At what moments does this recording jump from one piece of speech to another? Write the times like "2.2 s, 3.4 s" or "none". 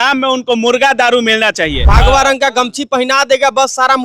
1.9 s